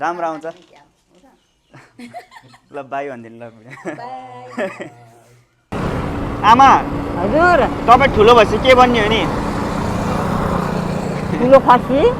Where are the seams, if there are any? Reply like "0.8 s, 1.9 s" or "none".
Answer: 5.8 s